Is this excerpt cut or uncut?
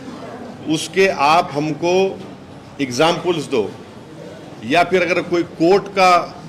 uncut